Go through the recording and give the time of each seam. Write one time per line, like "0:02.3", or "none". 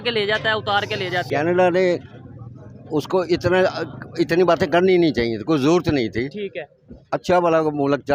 0:01.3